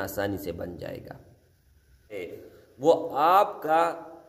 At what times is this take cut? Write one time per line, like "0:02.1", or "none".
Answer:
0:02.2

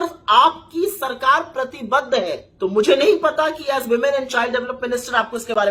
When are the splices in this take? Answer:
0:02.4

